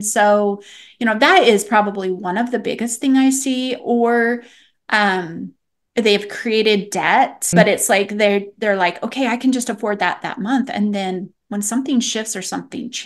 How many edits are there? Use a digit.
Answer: 1